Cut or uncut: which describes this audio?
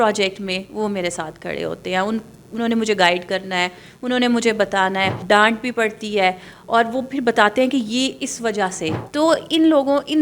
cut